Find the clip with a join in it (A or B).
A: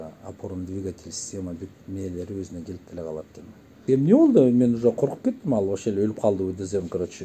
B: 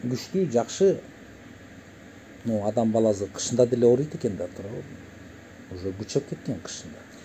A